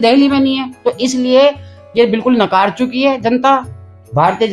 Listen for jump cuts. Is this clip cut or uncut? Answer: uncut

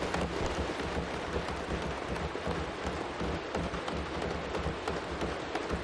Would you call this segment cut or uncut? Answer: uncut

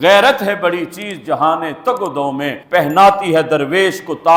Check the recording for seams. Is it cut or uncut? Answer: uncut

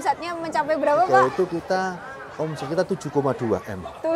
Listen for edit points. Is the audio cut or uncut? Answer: cut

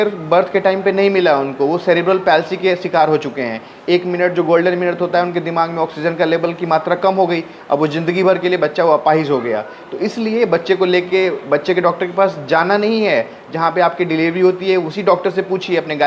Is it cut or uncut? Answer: uncut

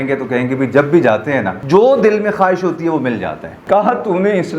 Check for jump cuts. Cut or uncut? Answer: cut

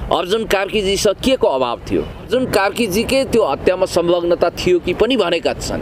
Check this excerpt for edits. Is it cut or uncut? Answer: cut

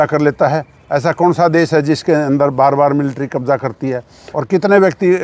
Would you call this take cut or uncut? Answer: cut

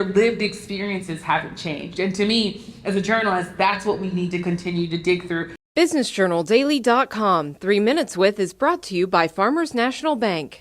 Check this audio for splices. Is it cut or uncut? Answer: cut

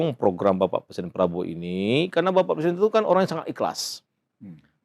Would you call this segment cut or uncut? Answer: uncut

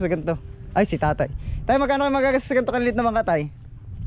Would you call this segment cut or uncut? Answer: uncut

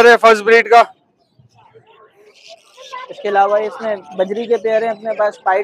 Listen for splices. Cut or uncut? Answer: cut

